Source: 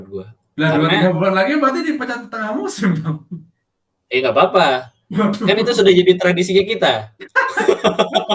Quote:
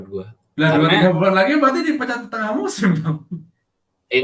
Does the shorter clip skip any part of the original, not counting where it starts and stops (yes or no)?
no